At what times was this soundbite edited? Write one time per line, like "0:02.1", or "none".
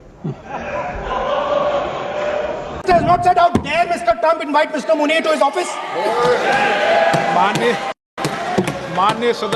none